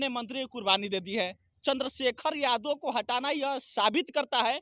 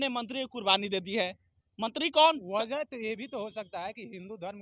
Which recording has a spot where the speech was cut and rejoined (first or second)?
first